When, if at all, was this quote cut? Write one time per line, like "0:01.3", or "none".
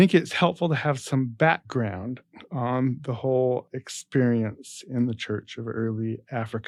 none